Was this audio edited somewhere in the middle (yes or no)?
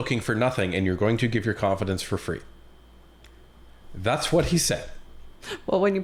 no